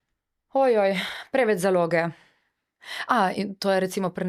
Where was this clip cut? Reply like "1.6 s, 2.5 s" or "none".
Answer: 2.7 s